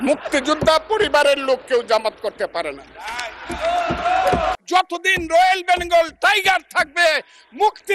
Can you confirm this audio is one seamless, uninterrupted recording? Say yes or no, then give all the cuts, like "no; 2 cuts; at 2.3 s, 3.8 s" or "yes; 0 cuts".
no; 1 cut; at 4.6 s